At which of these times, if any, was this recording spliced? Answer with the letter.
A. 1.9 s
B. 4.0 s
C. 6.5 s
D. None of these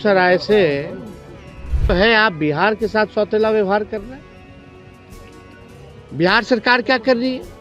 A